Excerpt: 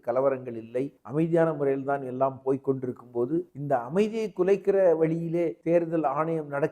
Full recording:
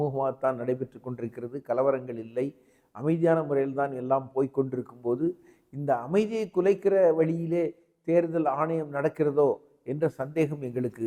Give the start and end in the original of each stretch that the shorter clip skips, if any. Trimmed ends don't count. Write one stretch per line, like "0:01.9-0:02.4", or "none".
0:02.6-0:02.9
0:05.4-0:05.7
0:07.7-0:08.0